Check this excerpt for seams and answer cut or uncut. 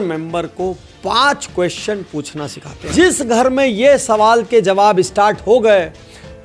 cut